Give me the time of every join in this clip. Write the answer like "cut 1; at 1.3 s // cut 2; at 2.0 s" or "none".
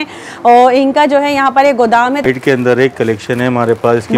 cut 1; at 2.2 s